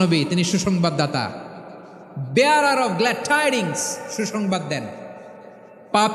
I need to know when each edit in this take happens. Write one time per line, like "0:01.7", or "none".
none